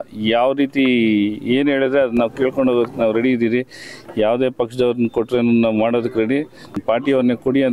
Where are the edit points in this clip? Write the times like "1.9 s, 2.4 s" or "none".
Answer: 6.8 s